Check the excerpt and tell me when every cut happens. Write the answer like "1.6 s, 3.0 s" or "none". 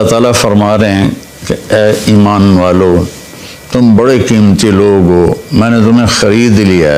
none